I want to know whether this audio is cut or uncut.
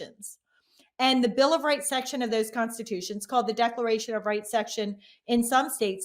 uncut